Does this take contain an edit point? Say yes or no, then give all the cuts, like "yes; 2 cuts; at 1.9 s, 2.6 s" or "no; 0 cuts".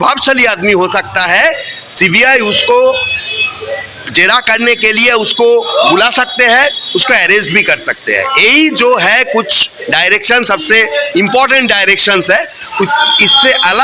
no; 0 cuts